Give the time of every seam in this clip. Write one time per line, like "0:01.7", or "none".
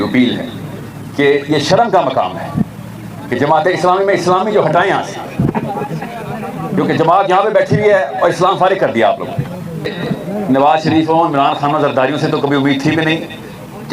0:09.9